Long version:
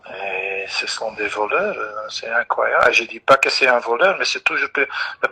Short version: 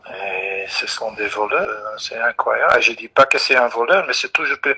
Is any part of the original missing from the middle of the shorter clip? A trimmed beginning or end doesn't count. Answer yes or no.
yes